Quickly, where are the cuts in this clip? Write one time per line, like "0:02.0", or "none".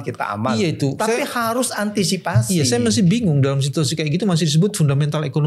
none